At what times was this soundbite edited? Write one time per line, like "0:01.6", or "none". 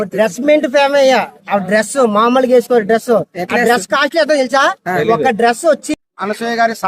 0:05.9